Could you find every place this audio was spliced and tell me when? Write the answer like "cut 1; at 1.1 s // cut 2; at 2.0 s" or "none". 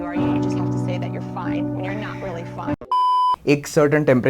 cut 1; at 3.3 s